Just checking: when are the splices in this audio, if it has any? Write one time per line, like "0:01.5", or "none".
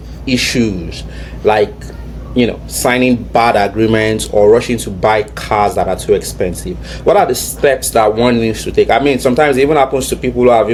none